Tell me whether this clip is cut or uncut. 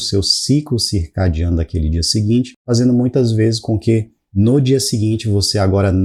uncut